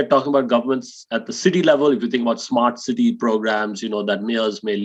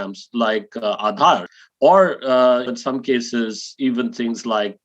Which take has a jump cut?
second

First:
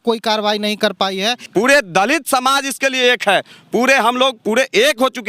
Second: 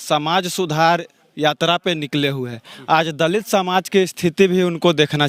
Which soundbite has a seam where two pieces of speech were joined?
first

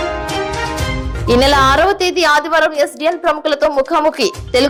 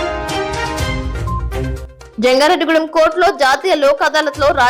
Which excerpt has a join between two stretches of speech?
second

